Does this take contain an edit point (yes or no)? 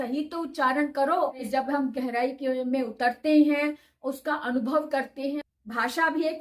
yes